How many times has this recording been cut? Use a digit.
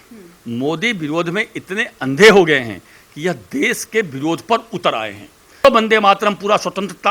1